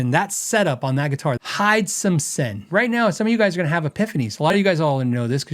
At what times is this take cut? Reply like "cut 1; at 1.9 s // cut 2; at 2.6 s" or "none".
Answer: cut 1; at 1.4 s // cut 2; at 2.7 s